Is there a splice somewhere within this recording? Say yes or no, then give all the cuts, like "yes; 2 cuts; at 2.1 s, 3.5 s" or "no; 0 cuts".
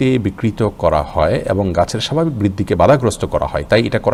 no; 0 cuts